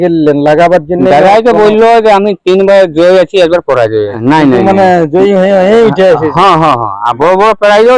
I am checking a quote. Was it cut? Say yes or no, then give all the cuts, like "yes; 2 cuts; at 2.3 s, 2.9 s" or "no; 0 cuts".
yes; 1 cut; at 4.2 s